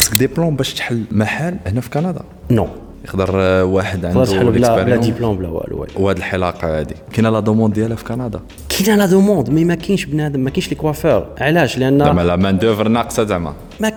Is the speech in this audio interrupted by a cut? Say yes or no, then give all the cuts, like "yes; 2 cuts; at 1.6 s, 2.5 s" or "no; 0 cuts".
no; 0 cuts